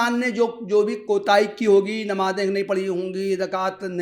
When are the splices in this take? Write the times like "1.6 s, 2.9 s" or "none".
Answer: none

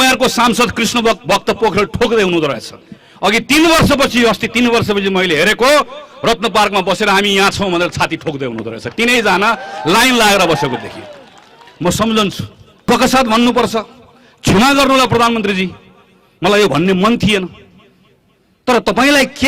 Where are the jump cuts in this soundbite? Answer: 12.9 s

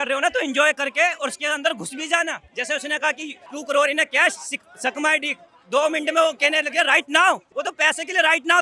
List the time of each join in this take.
2.5 s, 3.4 s, 7.5 s

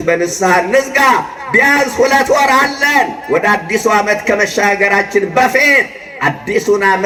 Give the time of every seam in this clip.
none

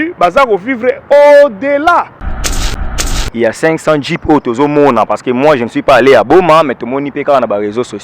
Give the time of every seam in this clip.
2.7 s

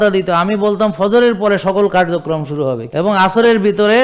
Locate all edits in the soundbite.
2.8 s

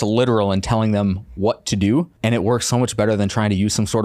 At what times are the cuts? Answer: 2.1 s

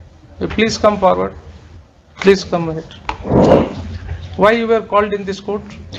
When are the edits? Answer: none

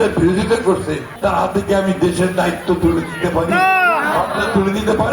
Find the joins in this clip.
1.0 s

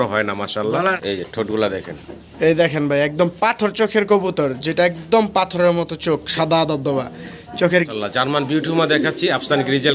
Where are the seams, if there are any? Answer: 1.0 s, 7.9 s

